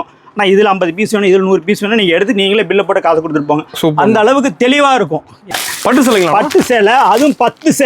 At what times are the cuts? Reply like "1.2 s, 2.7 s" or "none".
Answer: 5.5 s